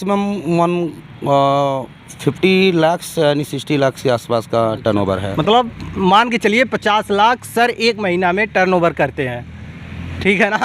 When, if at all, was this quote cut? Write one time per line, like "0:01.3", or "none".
none